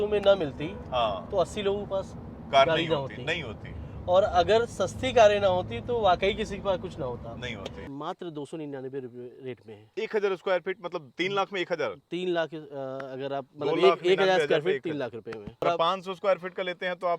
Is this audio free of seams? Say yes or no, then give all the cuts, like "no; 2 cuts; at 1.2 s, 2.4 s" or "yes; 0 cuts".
no; 2 cuts; at 7.8 s, 15.6 s